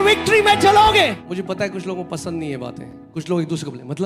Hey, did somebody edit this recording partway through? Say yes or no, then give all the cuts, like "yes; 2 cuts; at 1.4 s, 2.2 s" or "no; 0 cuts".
yes; 2 cuts; at 1.2 s, 2.9 s